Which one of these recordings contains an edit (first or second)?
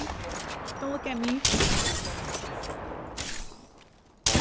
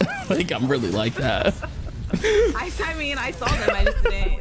second